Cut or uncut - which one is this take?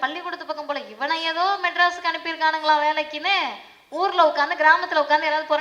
uncut